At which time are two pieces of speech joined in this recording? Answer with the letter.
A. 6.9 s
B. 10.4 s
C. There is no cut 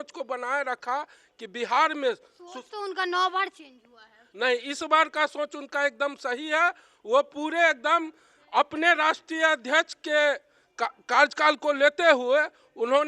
C